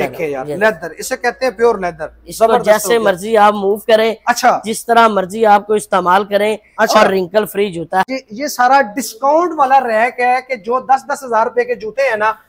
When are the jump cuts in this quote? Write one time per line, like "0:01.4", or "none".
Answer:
0:08.1